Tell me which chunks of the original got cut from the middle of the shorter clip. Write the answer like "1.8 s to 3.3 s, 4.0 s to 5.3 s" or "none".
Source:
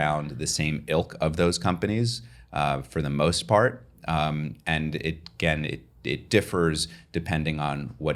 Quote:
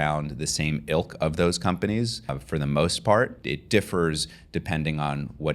2.4 s to 2.8 s, 3.8 s to 6.0 s